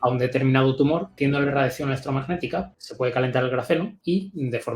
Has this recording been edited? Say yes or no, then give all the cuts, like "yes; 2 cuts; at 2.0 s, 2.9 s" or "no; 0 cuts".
yes; 3 cuts; at 1.1 s, 2.7 s, 3.9 s